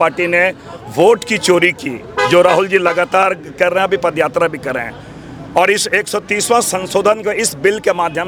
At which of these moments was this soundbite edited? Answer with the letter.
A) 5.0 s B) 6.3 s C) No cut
C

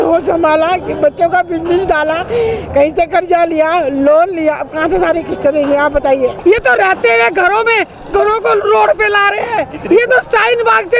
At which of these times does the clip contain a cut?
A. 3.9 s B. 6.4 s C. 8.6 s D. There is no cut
B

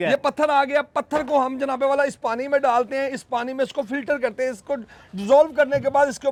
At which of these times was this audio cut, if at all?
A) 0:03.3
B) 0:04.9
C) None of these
C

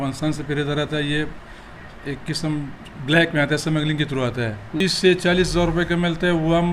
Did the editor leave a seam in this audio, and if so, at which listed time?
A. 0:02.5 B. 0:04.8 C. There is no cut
B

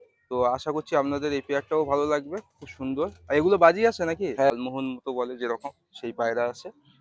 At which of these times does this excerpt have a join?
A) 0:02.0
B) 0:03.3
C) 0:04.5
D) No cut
C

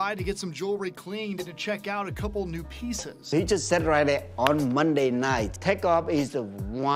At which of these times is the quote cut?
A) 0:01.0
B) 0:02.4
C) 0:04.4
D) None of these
D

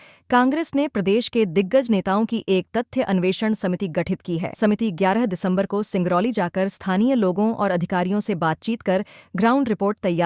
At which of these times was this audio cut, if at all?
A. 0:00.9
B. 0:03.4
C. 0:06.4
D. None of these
D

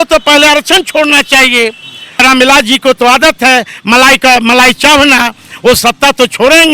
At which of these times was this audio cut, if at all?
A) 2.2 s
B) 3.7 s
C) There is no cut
A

